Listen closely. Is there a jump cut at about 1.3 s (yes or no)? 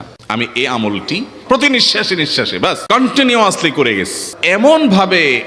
yes